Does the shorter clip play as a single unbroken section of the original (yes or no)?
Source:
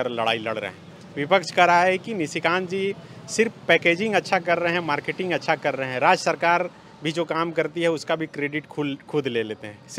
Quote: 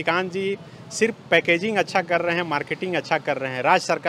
yes